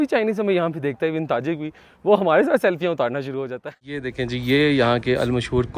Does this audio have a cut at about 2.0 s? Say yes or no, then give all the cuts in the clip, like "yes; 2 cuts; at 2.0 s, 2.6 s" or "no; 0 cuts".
no; 1 cut; at 3.5 s